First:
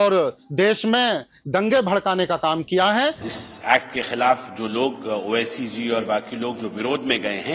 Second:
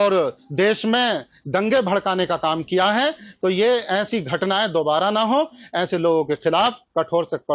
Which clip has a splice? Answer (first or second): first